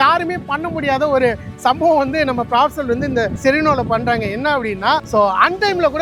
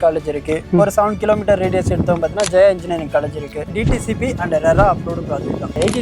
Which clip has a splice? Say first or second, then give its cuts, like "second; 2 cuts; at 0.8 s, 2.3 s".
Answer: second; 1 cut; at 3.7 s